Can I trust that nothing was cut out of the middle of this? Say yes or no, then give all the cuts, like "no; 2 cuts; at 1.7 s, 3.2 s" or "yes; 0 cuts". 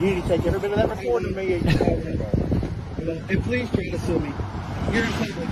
yes; 0 cuts